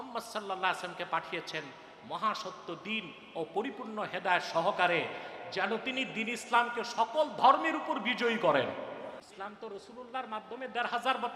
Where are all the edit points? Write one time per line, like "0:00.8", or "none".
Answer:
0:09.2